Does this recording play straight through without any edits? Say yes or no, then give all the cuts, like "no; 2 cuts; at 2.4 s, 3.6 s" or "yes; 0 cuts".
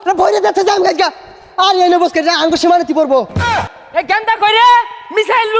no; 1 cut; at 3.7 s